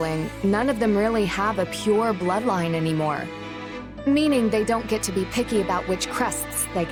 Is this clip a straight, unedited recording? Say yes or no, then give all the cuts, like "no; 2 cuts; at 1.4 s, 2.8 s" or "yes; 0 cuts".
yes; 0 cuts